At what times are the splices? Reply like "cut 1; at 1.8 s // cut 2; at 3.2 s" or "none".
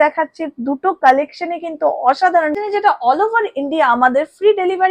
cut 1; at 2.6 s